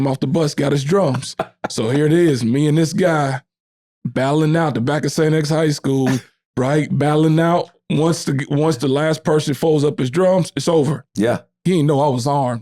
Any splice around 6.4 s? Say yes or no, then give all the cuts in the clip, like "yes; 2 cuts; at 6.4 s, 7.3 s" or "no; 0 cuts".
no; 1 cut; at 11.5 s